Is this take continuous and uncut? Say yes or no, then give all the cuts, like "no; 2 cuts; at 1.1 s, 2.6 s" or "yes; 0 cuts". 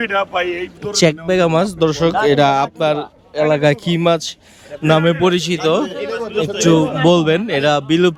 yes; 0 cuts